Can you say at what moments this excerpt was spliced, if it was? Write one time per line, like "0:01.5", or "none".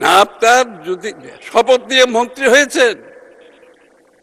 none